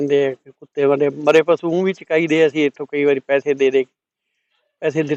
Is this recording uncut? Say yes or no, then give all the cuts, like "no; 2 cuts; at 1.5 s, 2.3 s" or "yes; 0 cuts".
yes; 0 cuts